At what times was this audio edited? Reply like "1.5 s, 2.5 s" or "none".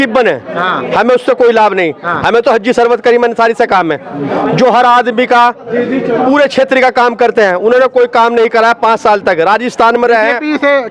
none